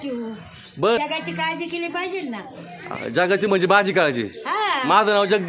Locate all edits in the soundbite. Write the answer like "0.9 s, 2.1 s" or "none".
1.0 s